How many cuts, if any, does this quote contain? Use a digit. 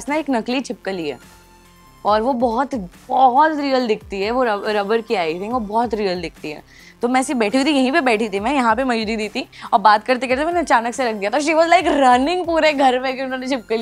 0